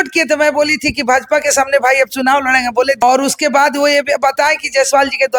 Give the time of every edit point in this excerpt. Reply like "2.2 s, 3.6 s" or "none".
3.0 s

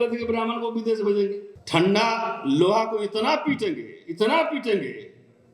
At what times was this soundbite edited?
1.5 s

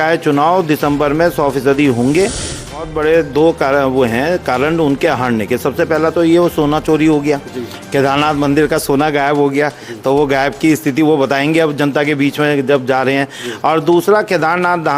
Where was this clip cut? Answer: 2.2 s

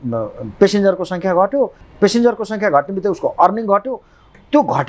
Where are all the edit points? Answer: 1.8 s

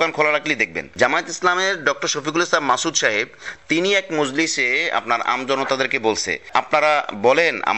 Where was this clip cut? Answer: none

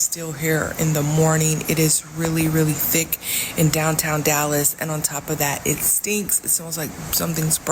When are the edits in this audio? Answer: none

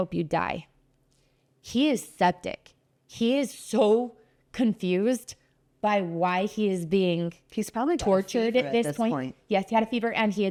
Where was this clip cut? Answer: none

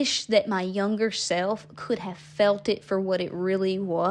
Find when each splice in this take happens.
none

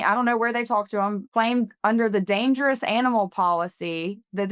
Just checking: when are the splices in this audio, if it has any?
1.2 s

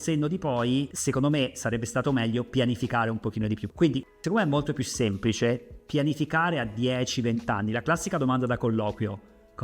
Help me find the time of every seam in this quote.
3.7 s

